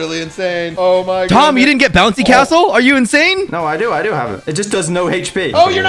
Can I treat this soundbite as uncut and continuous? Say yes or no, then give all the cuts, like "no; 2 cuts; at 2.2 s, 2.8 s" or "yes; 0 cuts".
yes; 0 cuts